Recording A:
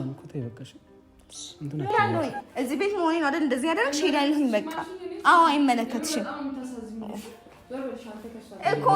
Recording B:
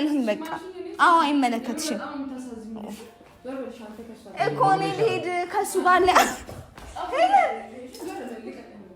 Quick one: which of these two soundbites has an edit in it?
A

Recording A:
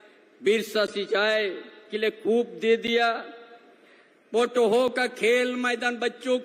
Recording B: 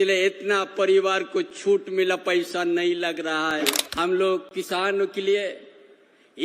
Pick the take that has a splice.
B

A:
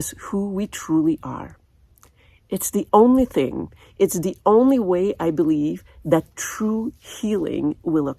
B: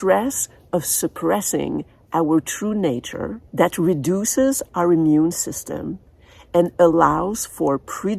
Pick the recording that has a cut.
B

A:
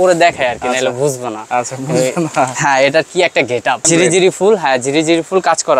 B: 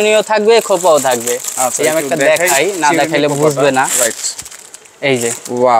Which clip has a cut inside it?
A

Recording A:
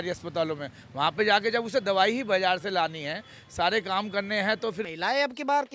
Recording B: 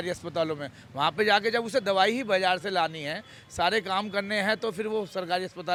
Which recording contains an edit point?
A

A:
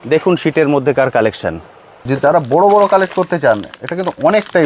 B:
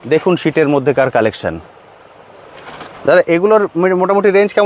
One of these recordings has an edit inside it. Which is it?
A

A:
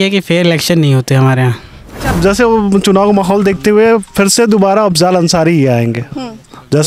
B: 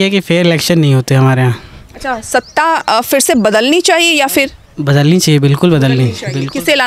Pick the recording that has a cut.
A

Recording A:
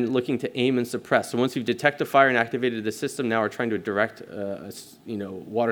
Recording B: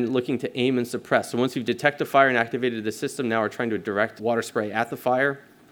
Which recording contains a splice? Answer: B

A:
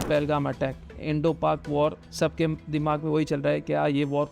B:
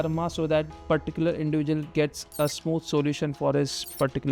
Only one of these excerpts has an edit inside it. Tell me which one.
A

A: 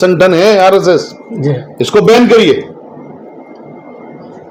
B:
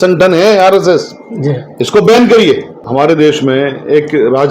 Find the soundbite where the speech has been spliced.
B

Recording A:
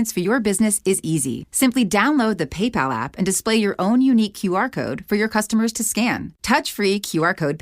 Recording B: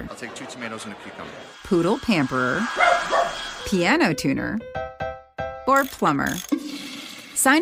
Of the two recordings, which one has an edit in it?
A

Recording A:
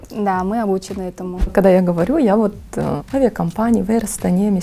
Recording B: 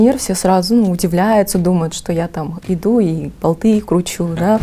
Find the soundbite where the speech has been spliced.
A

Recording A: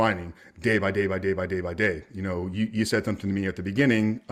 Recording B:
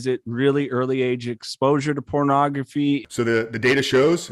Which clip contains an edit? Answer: B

